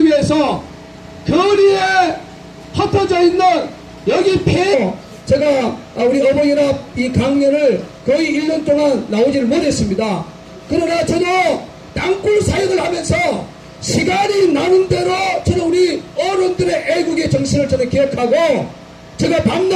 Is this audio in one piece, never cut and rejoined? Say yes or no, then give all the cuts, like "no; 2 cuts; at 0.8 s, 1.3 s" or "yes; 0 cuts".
yes; 0 cuts